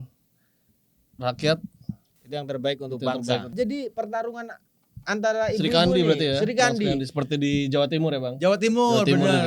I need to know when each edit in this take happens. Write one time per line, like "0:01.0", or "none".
0:03.5